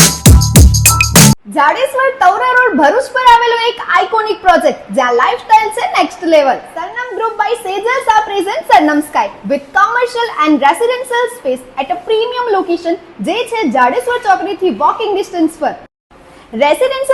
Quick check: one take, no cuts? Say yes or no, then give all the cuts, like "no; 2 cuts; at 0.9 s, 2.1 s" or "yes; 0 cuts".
no; 1 cut; at 1.4 s